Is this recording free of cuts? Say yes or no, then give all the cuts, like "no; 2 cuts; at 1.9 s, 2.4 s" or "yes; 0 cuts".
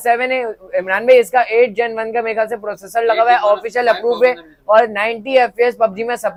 yes; 0 cuts